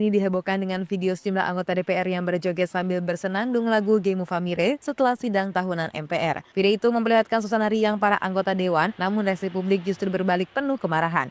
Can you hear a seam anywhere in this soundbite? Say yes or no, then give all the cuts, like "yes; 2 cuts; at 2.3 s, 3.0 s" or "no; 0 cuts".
no; 0 cuts